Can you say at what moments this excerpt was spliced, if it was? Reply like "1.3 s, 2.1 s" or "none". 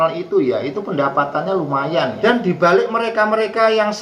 2.2 s